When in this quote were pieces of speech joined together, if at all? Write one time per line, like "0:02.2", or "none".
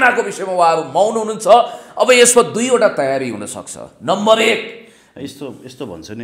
none

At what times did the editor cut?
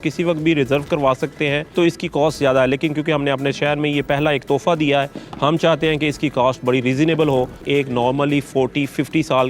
0:01.7
0:07.6

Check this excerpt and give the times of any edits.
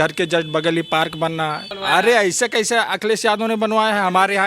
0:01.7

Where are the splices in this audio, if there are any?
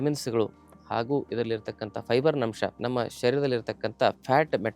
0:02.8

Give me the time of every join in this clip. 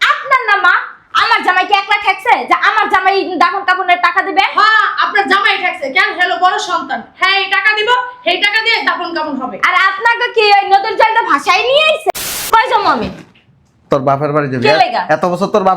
0:12.1

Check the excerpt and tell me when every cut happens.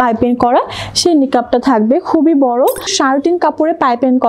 0:02.9

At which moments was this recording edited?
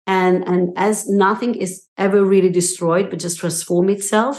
0:01.8

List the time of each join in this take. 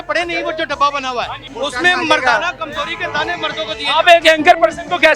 0:01.4

